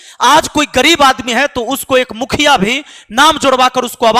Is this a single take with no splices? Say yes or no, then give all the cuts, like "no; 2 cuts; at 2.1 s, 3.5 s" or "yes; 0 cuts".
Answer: yes; 0 cuts